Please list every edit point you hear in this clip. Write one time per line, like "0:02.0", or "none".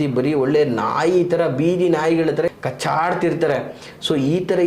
0:02.6